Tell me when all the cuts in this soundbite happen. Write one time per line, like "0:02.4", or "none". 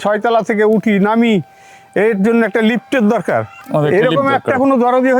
0:03.6